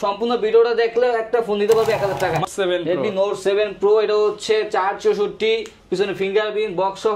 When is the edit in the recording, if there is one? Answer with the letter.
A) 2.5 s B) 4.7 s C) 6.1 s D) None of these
A